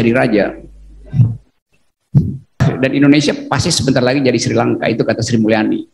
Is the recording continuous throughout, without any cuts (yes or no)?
no